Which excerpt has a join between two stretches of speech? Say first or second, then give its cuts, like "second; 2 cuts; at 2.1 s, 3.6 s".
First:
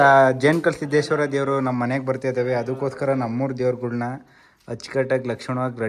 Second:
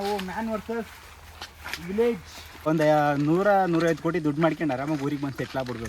second; 1 cut; at 2.7 s